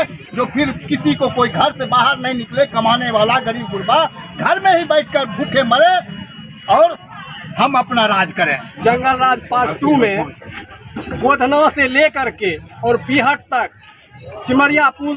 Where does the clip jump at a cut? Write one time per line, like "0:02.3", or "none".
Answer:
0:08.6

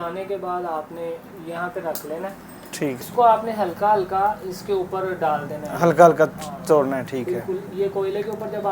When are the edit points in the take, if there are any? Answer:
0:03.0

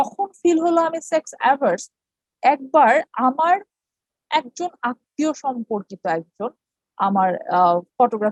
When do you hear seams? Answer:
none

